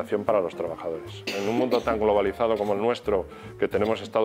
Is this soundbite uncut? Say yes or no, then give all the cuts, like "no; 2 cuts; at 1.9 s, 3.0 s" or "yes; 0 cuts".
no; 1 cut; at 1.3 s